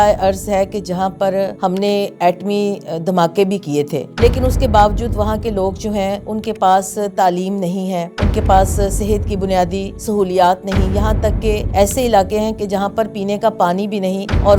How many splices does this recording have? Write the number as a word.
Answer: zero